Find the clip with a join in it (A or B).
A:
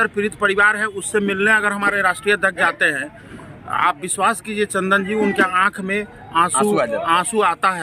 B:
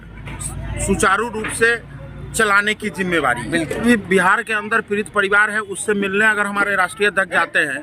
B